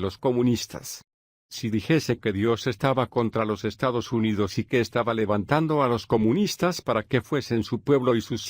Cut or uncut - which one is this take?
cut